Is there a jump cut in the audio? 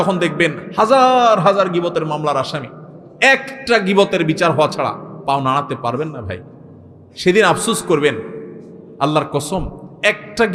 no; 0 cuts

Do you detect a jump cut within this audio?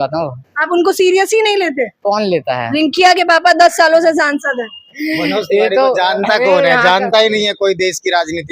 no; 0 cuts

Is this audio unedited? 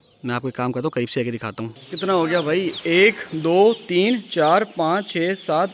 no; 1 cut; at 1.8 s

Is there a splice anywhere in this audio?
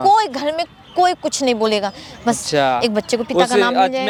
no; 0 cuts

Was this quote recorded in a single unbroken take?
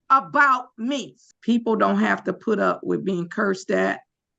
no; 1 cut; at 1.2 s

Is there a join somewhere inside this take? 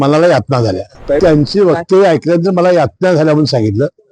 yes; 1 cut; at 1.2 s

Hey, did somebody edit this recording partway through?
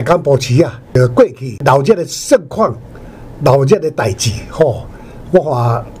yes; 2 cuts; at 0.9 s, 1.6 s

